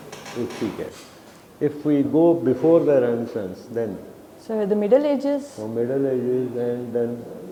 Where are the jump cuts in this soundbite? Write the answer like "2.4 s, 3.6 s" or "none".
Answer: none